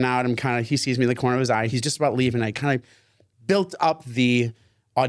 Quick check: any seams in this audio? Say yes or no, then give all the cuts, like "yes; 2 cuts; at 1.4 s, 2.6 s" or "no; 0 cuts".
yes; 1 cut; at 1.7 s